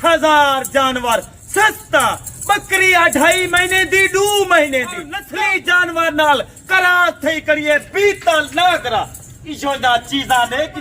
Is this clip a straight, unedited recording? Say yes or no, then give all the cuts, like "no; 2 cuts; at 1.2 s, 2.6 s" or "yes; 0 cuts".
no; 1 cut; at 5.2 s